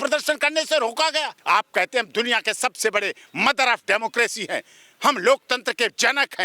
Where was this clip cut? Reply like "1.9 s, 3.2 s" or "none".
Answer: 1.3 s